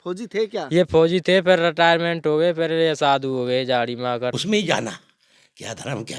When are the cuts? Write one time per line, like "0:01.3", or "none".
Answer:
0:04.4